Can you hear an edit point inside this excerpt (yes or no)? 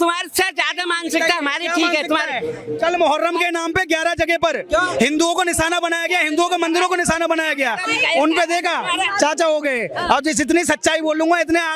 no